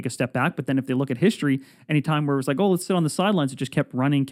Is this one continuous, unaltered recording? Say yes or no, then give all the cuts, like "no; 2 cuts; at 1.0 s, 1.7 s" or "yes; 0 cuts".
yes; 0 cuts